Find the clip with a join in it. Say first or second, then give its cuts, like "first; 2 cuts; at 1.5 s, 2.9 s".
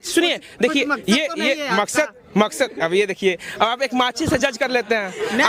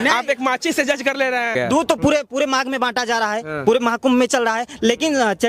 second; 1 cut; at 1.5 s